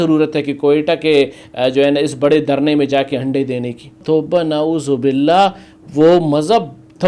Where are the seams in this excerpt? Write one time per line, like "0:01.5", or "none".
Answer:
0:04.0